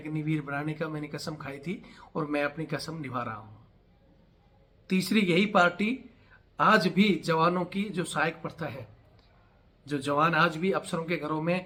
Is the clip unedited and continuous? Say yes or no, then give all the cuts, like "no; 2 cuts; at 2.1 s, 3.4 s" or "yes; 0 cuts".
yes; 0 cuts